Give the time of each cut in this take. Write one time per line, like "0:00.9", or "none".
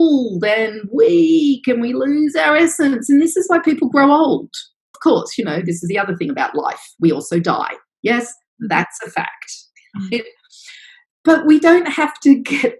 0:04.9